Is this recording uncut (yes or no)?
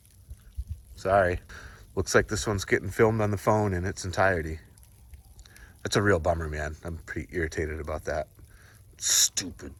yes